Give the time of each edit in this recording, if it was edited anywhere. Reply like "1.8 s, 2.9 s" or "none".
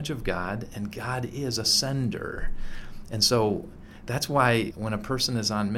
4.7 s